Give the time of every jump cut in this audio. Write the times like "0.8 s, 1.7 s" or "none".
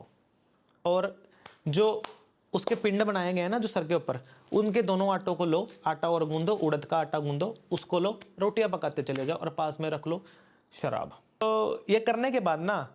11.4 s